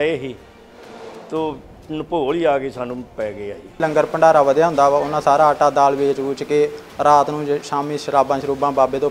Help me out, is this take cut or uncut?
cut